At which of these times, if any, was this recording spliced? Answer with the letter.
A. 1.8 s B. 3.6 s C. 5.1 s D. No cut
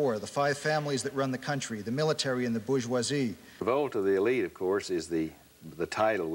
B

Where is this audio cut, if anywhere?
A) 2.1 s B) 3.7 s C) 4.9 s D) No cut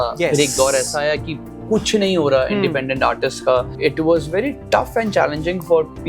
B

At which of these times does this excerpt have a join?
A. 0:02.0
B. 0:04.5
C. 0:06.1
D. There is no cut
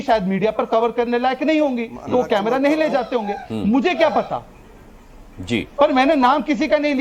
D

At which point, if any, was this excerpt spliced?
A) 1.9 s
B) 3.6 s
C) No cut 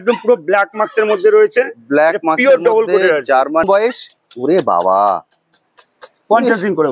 B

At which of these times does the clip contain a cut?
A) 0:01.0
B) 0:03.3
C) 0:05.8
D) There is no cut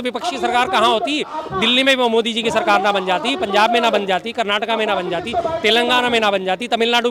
D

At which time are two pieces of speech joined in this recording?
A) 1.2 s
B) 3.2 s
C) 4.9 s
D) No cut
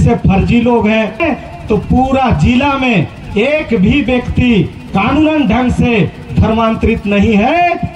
A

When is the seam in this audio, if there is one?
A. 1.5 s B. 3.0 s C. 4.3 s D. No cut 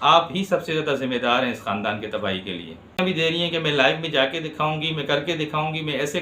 B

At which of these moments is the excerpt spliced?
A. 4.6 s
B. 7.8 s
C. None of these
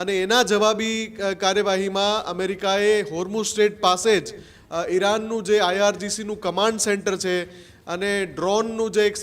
C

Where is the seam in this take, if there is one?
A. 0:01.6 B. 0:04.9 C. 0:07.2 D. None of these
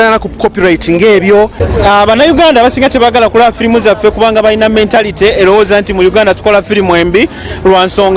A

